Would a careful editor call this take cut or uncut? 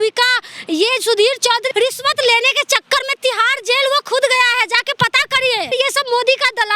cut